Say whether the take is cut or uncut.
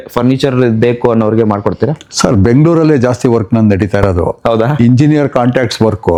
uncut